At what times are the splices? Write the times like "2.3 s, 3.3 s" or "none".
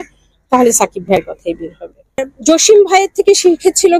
2.3 s